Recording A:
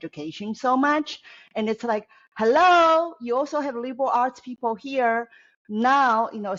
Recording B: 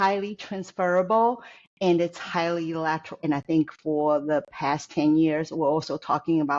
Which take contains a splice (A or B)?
B